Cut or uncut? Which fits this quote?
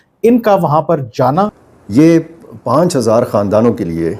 cut